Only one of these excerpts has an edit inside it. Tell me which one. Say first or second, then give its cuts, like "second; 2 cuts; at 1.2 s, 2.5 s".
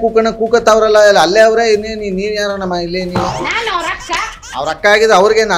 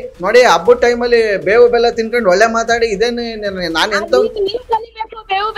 first; 2 cuts; at 3.3 s, 4.4 s